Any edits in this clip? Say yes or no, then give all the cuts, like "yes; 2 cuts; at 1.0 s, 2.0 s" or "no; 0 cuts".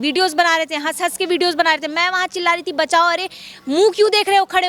no; 0 cuts